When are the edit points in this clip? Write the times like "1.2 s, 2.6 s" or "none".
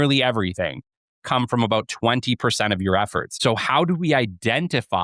3.2 s